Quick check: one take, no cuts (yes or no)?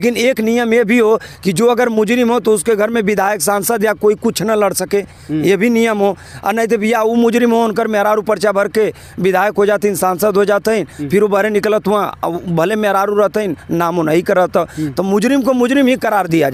yes